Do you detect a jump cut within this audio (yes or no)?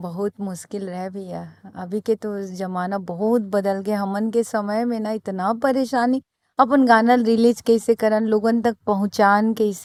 no